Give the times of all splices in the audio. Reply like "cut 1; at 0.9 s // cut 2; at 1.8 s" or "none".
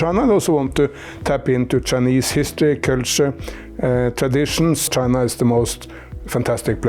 cut 1; at 4.9 s

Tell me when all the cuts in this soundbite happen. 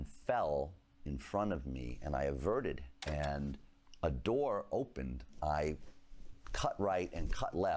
cut 1; at 2.9 s // cut 2; at 5.3 s

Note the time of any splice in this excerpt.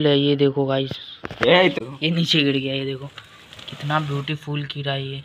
none

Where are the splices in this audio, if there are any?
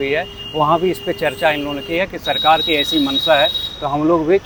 none

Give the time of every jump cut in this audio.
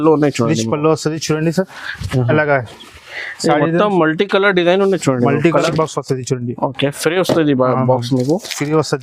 cut 1; at 5.7 s

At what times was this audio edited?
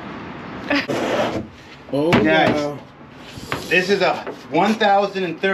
cut 1; at 0.9 s

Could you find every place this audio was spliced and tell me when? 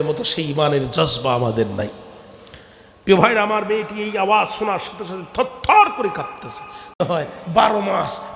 cut 1; at 7.0 s

